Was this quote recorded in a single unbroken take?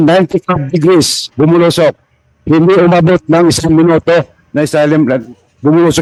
yes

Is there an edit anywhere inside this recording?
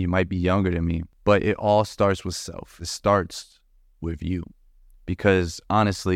yes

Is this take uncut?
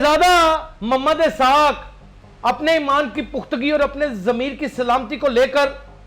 yes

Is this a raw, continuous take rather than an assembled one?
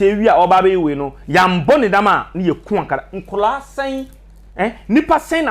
yes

